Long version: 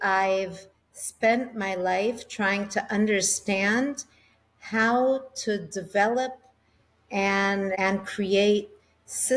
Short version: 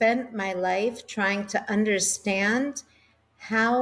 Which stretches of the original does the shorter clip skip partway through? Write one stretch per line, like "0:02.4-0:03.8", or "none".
none